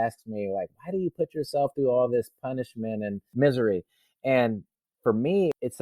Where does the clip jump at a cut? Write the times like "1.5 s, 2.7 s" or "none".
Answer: 3.3 s